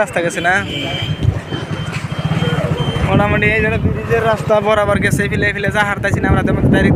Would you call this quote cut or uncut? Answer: uncut